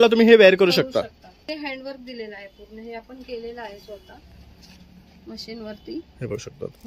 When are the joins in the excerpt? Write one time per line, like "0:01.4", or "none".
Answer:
0:01.4